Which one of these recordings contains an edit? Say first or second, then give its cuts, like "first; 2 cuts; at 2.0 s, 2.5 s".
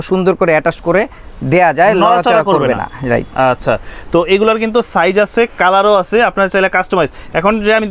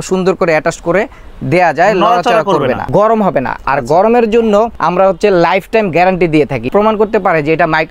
second; 3 cuts; at 2.8 s, 4.8 s, 6.7 s